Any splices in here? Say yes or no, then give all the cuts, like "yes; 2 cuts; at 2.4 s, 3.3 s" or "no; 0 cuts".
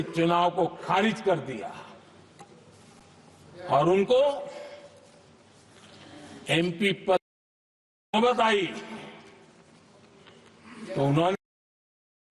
no; 0 cuts